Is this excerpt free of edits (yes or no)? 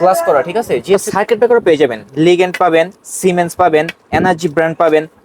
no